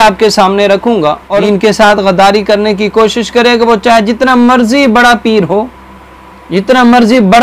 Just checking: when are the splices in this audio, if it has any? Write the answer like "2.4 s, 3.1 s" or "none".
1.3 s